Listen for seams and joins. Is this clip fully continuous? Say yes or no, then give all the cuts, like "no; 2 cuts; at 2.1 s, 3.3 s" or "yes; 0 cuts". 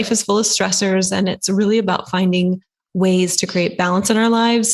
yes; 0 cuts